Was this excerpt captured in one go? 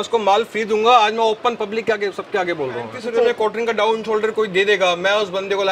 no; 1 cut; at 3.0 s

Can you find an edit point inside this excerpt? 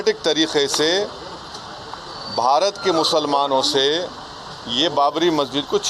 no; 0 cuts

